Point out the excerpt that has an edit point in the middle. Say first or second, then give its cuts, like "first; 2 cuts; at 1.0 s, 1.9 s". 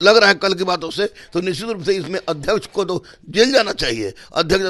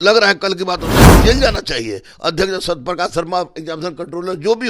second; 1 cut; at 1.1 s